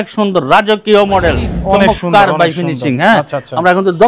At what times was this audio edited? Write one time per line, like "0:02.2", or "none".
0:01.5